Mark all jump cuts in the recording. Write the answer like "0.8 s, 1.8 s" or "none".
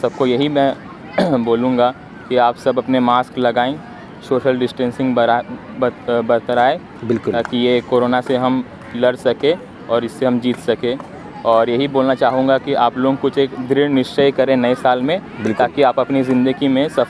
none